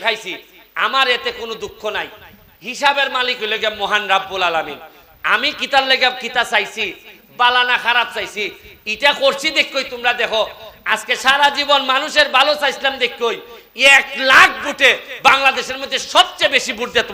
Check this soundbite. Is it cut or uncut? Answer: uncut